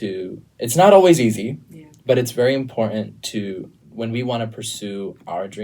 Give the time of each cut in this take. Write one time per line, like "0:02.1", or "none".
0:03.8